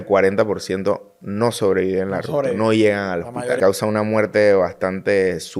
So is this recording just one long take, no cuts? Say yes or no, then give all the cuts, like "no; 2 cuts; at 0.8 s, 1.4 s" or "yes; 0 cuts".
no; 1 cut; at 3.6 s